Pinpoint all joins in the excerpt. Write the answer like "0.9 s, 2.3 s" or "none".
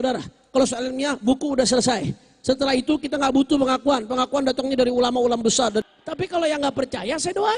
5.9 s